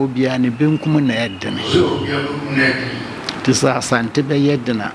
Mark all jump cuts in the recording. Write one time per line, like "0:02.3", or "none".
none